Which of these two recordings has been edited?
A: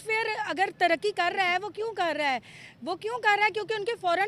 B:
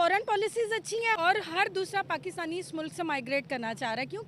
B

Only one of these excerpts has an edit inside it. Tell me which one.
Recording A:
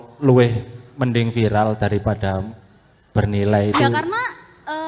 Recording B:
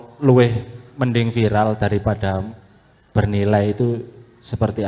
A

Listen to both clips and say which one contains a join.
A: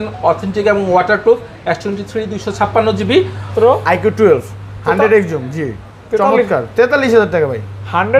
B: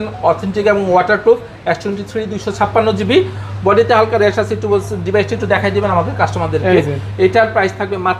A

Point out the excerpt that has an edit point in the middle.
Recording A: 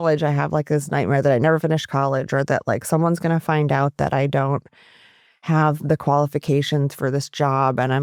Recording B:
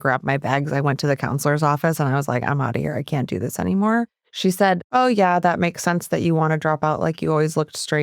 B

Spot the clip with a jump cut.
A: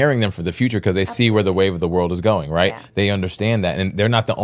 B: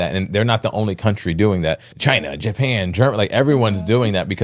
B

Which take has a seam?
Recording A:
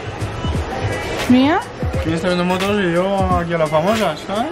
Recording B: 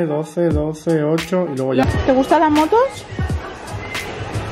B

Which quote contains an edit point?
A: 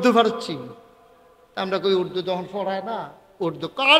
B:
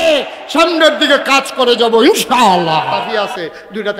B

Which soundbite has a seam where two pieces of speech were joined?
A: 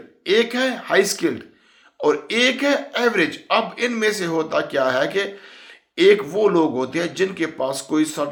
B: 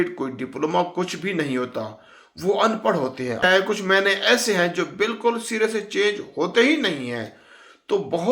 B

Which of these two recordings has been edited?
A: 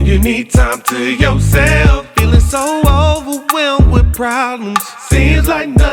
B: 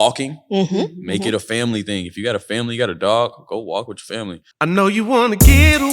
B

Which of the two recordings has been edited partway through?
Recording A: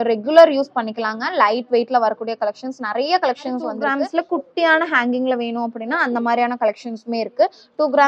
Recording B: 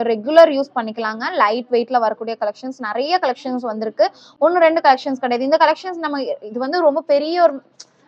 A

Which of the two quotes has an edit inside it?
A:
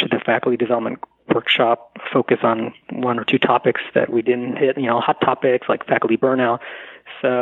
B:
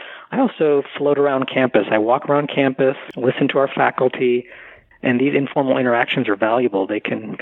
B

